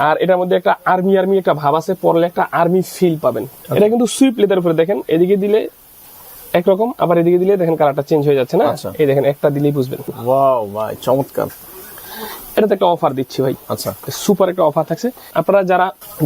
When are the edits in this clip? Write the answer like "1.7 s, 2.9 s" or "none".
3.5 s, 10.1 s, 15.2 s